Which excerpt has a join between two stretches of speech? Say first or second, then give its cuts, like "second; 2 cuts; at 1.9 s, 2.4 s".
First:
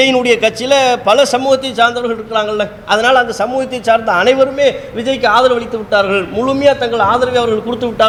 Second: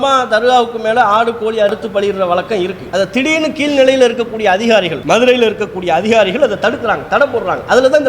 second; 2 cuts; at 1.7 s, 2.8 s